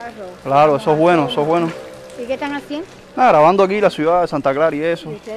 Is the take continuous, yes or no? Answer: yes